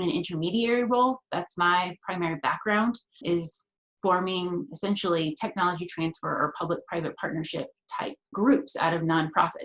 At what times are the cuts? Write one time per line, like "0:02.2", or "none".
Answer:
0:03.2
0:08.3